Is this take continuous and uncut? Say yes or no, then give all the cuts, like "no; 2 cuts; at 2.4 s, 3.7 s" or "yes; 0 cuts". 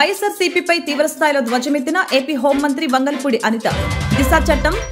yes; 0 cuts